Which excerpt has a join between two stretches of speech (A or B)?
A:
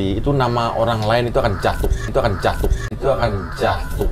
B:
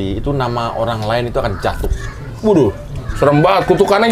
B